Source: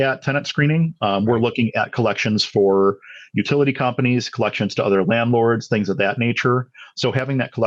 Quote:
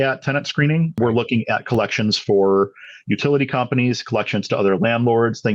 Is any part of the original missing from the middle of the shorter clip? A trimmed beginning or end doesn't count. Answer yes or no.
yes